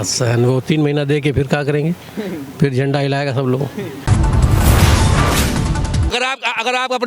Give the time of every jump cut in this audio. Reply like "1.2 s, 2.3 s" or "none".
4.1 s, 6.1 s

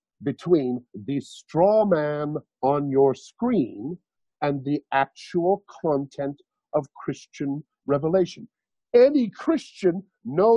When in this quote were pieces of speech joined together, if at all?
none

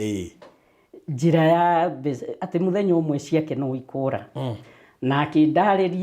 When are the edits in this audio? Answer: none

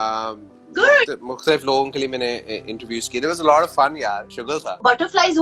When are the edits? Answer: none

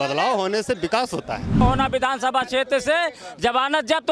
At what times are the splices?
1.6 s

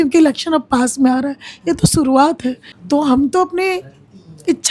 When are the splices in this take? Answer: 2.7 s

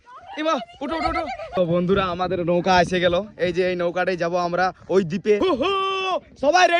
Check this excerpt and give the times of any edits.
1.6 s, 5.4 s

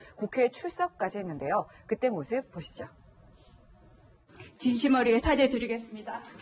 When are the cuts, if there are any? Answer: 1.3 s

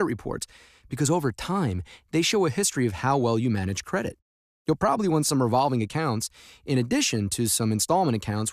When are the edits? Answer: 6.8 s

